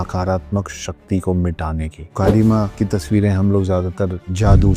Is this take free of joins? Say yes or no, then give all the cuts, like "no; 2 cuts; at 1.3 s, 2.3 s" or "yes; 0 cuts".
no; 2 cuts; at 2.0 s, 2.7 s